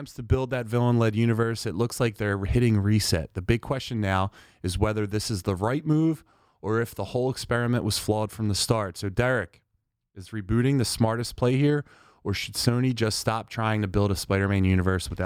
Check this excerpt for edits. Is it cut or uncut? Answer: uncut